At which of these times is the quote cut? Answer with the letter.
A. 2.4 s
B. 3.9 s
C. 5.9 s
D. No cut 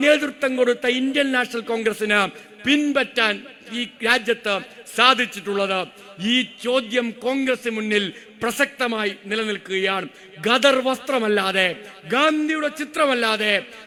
D